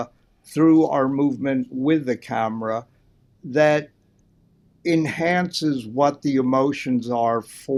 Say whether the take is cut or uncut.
uncut